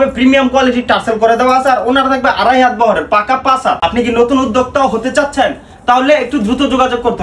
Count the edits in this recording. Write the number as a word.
one